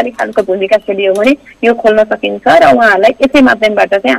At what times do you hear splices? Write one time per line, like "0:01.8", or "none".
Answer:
none

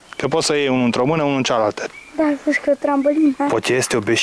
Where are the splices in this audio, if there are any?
0:01.8

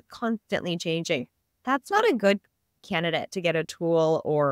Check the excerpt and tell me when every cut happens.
none

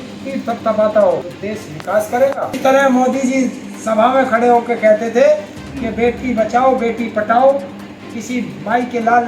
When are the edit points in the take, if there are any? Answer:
0:01.3
0:02.6

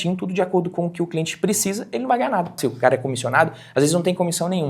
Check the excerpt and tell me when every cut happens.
0:02.6

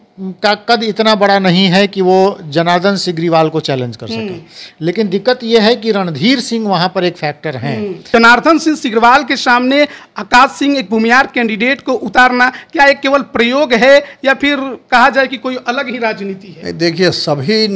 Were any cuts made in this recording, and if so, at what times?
0:07.9

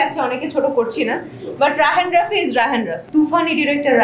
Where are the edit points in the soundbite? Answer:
0:03.0

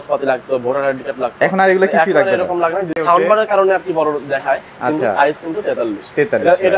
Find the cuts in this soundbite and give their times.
0:03.0

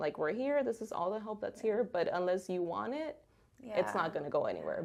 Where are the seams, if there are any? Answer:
none

